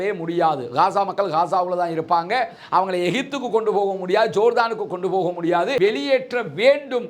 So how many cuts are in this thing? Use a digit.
1